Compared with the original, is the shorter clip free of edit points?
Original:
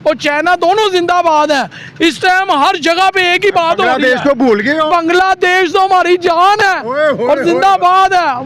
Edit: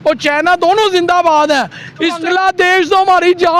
no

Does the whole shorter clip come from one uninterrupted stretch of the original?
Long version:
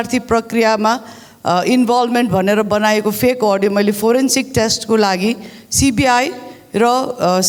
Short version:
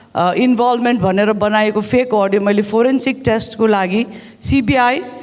yes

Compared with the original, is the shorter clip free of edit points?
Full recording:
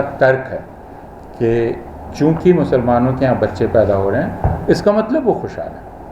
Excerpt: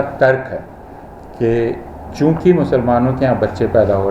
yes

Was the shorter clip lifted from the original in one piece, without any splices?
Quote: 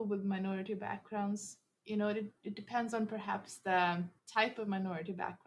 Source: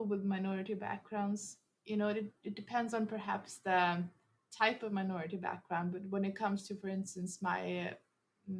no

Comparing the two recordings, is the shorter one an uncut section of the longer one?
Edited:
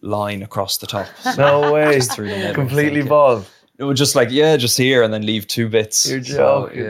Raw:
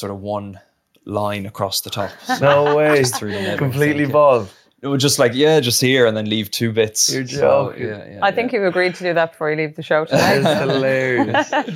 yes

